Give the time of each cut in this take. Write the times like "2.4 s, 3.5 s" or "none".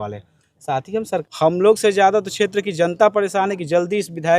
1.2 s